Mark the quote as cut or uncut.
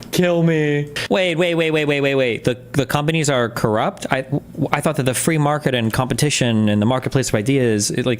cut